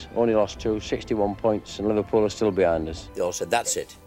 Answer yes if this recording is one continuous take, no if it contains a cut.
no